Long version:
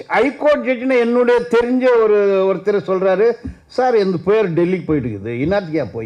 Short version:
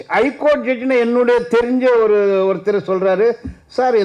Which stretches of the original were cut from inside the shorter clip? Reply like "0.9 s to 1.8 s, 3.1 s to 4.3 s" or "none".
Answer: none